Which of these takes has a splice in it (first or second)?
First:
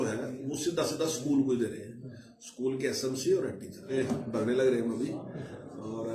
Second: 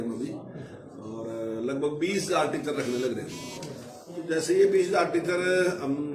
first